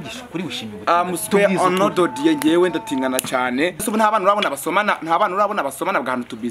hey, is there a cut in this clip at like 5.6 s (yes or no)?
no